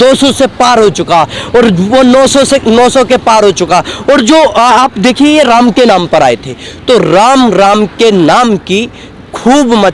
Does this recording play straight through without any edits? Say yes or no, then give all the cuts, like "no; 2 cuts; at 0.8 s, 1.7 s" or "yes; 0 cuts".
yes; 0 cuts